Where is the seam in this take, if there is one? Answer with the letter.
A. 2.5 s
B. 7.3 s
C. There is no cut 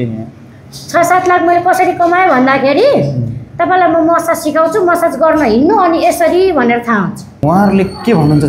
B